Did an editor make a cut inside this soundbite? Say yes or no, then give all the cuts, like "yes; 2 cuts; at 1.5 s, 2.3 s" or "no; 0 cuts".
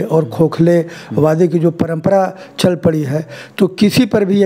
no; 0 cuts